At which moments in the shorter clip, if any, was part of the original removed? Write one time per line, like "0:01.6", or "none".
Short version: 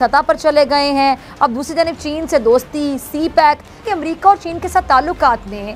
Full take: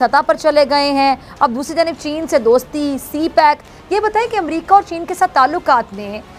0:03.8